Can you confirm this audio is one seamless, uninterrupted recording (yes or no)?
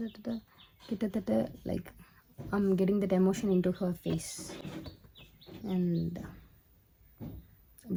yes